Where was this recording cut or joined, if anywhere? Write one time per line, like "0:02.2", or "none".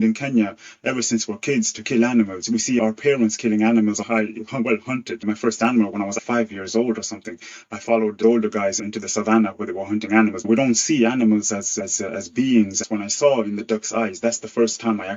none